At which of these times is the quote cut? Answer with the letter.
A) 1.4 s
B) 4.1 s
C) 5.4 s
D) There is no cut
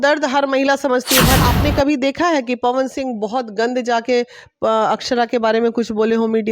A